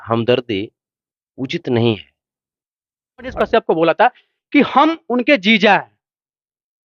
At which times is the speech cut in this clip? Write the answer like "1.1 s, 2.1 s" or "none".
3.3 s